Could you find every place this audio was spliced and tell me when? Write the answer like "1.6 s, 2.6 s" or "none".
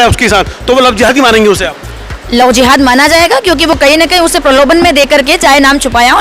none